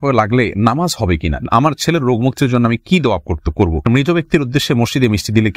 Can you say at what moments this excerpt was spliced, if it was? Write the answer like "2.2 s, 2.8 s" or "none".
1.4 s, 3.9 s